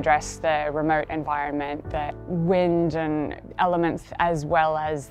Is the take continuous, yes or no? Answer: yes